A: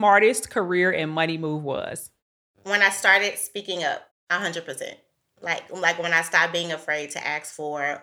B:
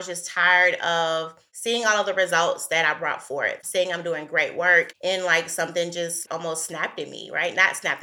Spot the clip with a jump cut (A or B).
B